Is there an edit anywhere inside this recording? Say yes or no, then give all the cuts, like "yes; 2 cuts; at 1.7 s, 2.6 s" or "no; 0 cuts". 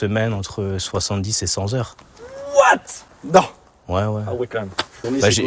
no; 0 cuts